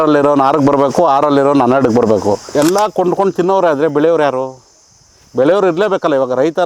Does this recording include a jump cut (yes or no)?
yes